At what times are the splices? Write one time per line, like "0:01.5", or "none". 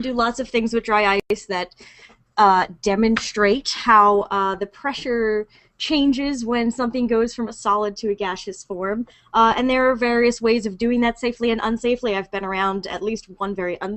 none